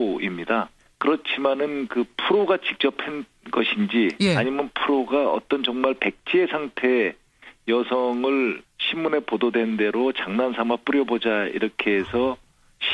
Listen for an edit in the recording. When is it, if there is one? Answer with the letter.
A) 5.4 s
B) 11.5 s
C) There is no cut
A